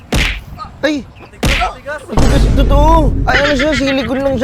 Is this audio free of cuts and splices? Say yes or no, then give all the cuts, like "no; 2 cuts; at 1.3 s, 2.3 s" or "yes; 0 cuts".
yes; 0 cuts